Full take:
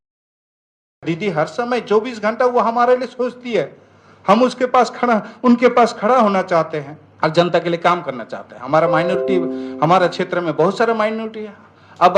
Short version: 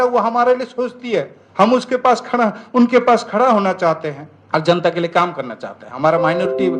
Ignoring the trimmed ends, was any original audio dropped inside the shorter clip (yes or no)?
yes